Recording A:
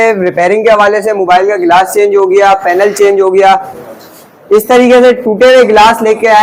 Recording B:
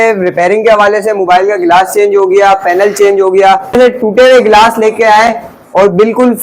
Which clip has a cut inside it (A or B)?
B